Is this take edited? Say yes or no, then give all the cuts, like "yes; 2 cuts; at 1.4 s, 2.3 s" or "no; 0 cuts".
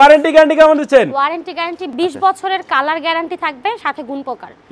no; 0 cuts